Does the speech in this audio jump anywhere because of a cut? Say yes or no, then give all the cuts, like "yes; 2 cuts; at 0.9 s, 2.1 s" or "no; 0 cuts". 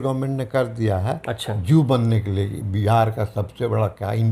no; 0 cuts